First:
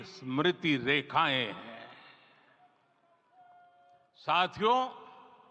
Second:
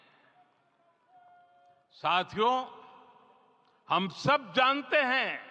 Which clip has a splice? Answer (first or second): first